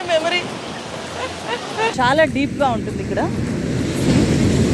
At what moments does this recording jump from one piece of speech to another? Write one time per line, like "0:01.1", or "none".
0:01.9

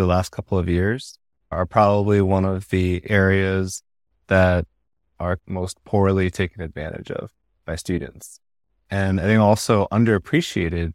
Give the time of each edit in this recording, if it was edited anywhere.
0:01.5
0:05.4

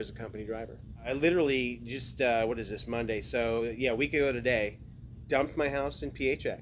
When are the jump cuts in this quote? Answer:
0:01.1

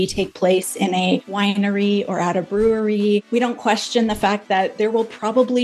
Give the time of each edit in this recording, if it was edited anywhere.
0:01.3
0:03.2

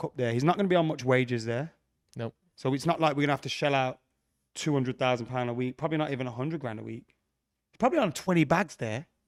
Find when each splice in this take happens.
none

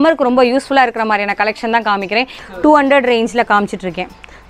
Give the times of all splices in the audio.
0:02.4

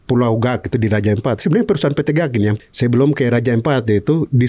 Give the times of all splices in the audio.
0:02.6

